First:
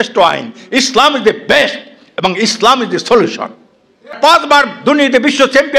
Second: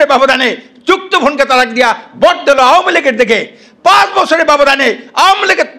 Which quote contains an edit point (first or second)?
first